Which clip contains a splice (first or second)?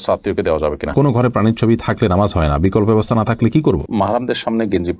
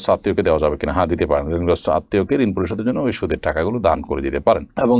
first